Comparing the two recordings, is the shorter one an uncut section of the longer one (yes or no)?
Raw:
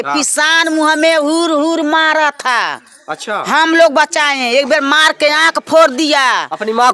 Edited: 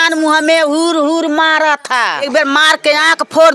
no